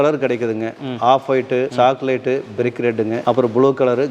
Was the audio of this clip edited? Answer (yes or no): yes